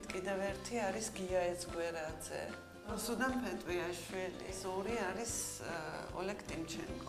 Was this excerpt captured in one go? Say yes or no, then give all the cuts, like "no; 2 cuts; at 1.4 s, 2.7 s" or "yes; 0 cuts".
no; 1 cut; at 4.9 s